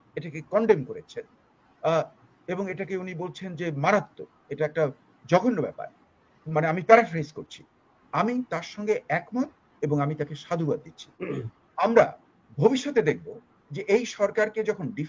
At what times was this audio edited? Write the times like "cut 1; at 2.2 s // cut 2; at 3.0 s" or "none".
cut 1; at 11.2 s